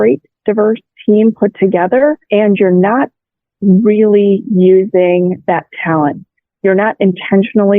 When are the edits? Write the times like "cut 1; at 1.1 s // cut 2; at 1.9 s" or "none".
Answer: cut 1; at 2.2 s